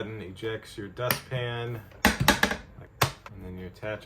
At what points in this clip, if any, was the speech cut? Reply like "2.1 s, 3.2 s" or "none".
2.8 s